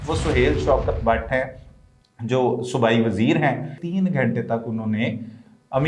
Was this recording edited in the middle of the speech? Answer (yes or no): yes